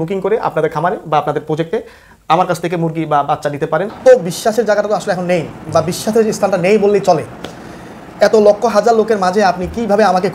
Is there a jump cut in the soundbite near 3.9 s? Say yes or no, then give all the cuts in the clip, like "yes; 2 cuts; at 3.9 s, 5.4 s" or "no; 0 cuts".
yes; 1 cut; at 3.9 s